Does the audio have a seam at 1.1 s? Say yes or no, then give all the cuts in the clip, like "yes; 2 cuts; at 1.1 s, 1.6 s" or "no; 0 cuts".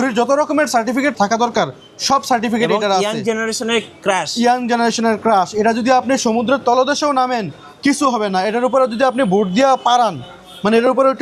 yes; 1 cut; at 1.1 s